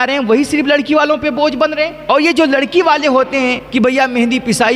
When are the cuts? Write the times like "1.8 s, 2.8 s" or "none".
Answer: 2.0 s, 3.6 s